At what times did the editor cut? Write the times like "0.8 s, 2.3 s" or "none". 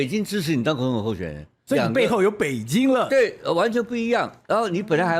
1.6 s